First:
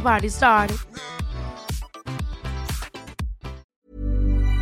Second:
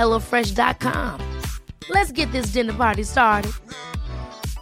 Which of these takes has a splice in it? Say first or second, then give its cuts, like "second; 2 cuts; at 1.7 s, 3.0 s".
first; 1 cut; at 3.6 s